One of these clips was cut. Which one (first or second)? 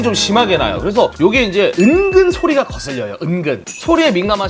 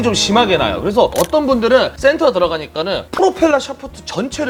first